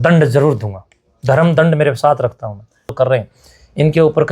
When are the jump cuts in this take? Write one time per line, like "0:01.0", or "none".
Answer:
0:02.9